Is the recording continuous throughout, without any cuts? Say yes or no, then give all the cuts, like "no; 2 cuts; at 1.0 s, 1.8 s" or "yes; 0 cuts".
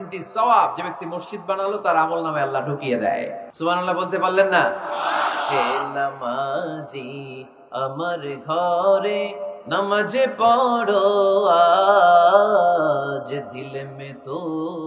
no; 1 cut; at 3.4 s